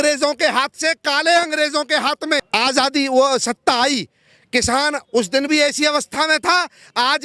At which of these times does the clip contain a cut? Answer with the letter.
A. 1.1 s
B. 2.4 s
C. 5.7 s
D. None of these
B